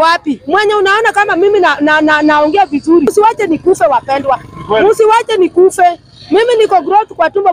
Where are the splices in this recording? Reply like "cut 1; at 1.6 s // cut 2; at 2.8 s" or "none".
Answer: cut 1; at 3.1 s